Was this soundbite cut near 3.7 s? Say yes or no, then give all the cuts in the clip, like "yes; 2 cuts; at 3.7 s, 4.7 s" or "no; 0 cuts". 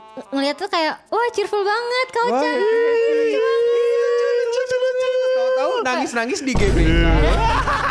no; 0 cuts